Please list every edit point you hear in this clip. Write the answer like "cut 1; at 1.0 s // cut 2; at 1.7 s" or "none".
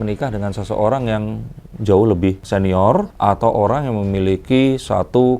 none